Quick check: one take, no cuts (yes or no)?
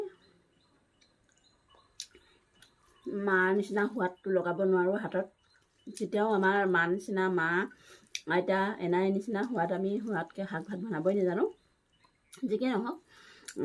no